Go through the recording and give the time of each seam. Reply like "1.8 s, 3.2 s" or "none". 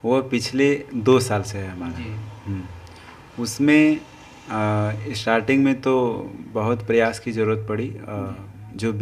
none